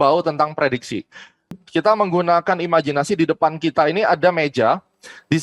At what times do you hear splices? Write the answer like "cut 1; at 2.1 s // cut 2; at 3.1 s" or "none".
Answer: cut 1; at 1.5 s